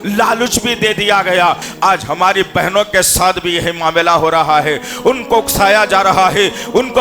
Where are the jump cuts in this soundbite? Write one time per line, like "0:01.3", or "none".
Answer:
0:01.6